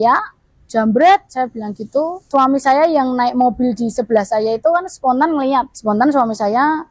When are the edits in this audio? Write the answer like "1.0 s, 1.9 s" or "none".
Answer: 2.2 s, 5.7 s